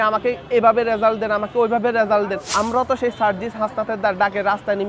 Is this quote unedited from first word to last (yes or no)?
no